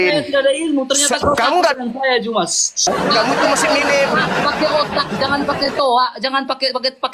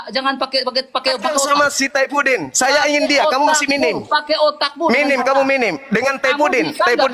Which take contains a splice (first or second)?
first